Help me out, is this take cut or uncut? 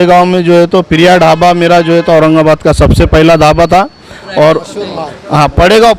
uncut